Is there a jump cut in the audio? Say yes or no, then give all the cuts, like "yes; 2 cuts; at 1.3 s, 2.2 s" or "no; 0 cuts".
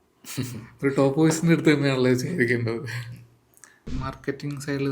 yes; 1 cut; at 3.9 s